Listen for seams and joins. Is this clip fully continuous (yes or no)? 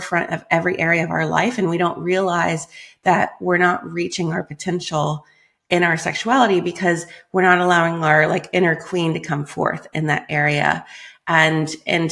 yes